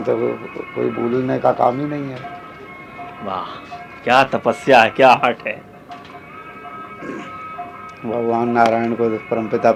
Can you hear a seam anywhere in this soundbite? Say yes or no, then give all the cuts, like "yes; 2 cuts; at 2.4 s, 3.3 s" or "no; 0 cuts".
no; 0 cuts